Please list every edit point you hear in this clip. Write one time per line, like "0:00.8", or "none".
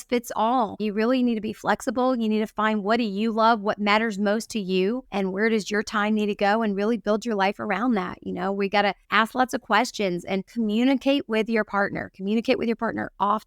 0:00.8
0:05.1
0:09.0
0:10.5